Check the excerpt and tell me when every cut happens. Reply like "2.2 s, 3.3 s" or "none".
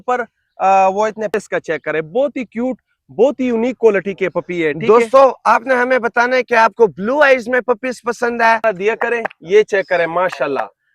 1.3 s, 8.6 s